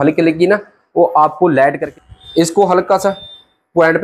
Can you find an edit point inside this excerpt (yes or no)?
yes